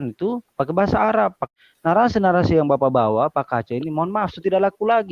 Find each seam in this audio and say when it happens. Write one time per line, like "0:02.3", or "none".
0:01.4